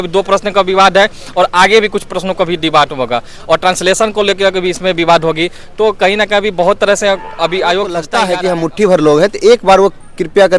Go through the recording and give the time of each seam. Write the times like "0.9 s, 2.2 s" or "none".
8.1 s